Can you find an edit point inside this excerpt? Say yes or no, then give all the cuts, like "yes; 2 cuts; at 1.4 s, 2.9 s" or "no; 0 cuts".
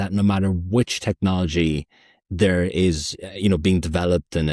no; 0 cuts